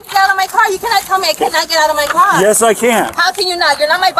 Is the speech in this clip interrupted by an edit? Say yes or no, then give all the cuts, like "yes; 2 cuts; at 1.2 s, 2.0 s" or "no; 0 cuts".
no; 0 cuts